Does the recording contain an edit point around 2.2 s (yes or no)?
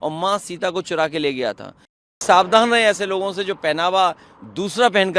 yes